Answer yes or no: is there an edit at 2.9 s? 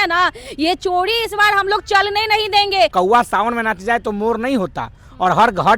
yes